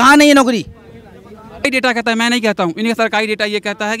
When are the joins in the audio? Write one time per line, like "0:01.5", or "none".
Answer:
0:01.6